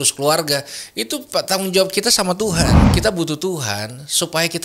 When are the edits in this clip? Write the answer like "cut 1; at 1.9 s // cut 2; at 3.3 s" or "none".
cut 1; at 2.8 s

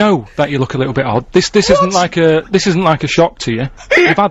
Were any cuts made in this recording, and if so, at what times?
none

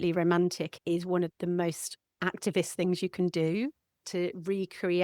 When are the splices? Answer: cut 1; at 1.1 s // cut 2; at 4.0 s

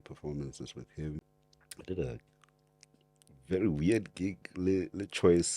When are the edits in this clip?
cut 1; at 1.4 s

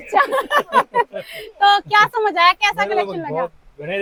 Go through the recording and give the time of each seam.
none

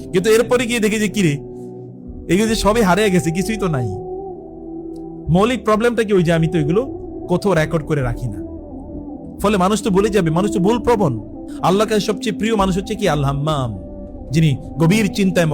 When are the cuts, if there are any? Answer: cut 1; at 11.4 s

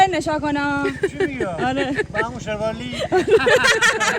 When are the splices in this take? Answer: none

